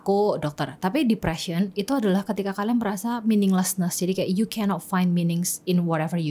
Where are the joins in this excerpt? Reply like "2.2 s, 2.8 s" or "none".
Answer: none